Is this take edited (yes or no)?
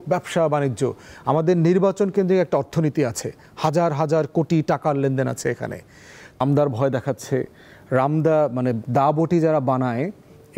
yes